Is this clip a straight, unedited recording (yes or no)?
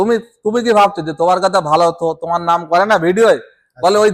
yes